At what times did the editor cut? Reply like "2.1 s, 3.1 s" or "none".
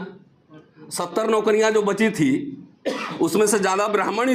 none